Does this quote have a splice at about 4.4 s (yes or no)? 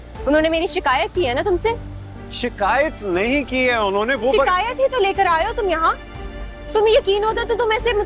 no